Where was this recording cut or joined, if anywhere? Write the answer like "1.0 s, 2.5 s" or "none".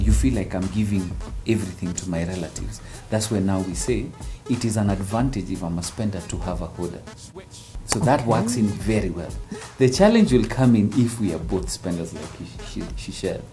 none